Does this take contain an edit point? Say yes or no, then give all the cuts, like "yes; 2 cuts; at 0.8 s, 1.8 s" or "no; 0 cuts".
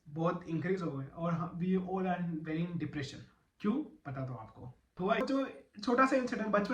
yes; 1 cut; at 5.2 s